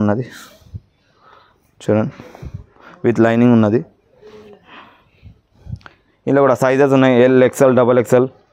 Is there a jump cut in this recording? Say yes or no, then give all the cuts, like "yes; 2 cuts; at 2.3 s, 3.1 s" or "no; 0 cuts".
no; 0 cuts